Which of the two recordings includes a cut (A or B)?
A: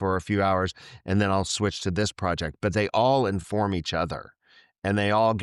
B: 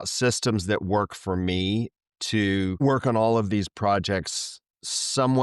B